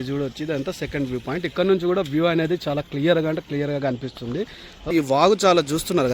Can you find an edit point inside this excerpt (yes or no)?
yes